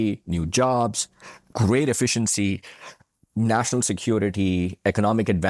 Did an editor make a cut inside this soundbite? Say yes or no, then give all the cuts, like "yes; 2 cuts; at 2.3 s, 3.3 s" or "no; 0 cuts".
yes; 1 cut; at 1.5 s